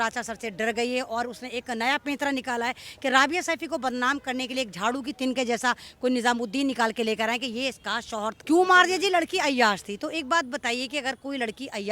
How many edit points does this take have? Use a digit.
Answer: 1